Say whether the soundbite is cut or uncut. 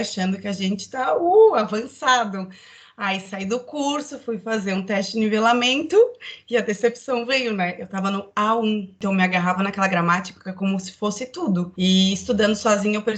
cut